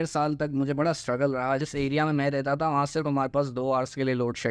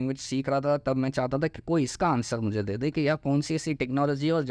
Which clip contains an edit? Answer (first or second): first